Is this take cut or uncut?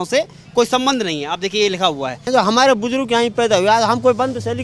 cut